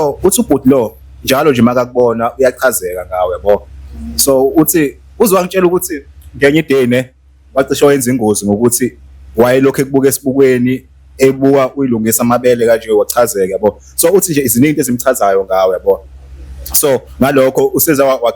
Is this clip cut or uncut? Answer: uncut